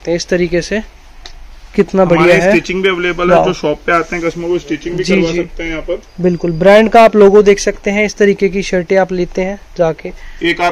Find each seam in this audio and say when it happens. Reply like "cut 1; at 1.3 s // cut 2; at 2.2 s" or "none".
none